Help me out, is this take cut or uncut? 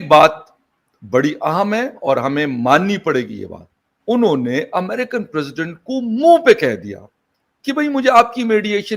cut